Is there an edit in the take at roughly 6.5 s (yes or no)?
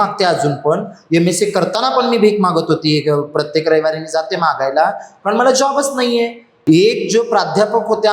yes